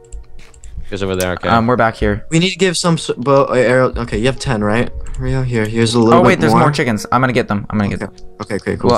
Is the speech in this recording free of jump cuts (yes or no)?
no